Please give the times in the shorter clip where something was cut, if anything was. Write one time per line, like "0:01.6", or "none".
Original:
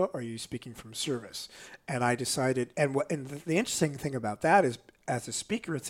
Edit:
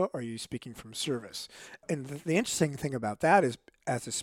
0:01.9